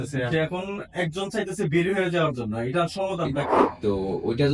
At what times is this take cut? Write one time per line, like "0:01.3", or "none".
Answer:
0:03.6